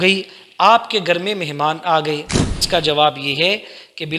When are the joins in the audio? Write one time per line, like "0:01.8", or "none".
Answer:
0:02.6

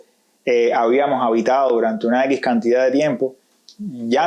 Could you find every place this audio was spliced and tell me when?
none

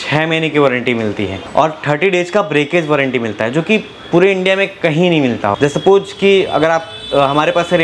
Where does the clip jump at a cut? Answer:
0:01.4
0:05.6

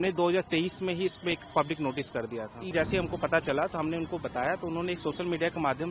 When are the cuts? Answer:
0:02.7

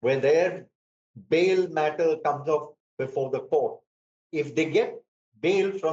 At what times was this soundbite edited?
0:04.2

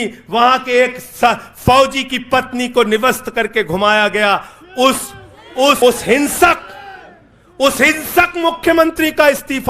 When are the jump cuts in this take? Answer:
0:05.8

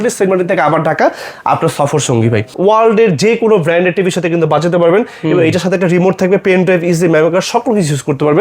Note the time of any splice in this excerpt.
0:02.5

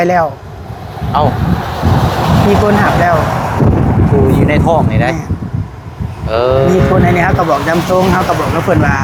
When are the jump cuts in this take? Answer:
none

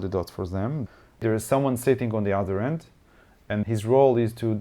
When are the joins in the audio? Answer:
0:01.2
0:03.7

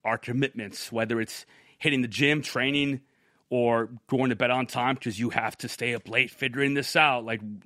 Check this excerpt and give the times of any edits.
none

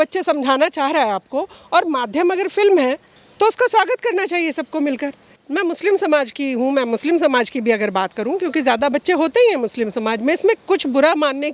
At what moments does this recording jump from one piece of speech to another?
0:05.3

